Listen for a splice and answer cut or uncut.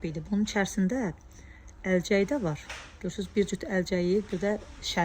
uncut